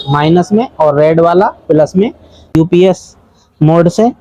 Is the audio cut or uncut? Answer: cut